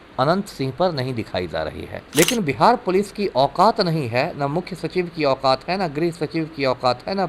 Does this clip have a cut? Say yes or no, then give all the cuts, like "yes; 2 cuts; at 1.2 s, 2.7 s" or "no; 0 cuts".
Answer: yes; 1 cut; at 2.1 s